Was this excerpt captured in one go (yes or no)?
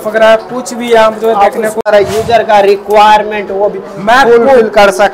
no